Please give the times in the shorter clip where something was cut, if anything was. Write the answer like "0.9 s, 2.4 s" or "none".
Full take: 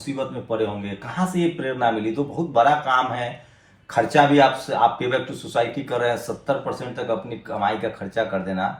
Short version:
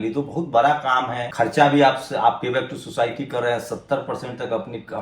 1.2 s